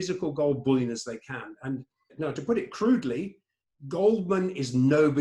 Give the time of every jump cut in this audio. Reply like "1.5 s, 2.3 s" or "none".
2.1 s